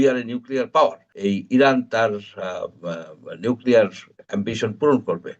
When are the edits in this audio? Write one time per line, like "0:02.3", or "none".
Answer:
0:01.1